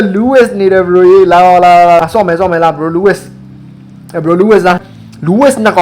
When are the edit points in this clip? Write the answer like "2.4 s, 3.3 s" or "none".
2.0 s, 4.8 s